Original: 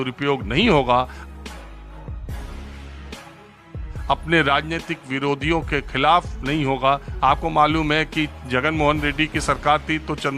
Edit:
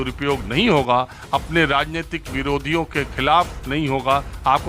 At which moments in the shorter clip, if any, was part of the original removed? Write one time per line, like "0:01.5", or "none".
0:01.2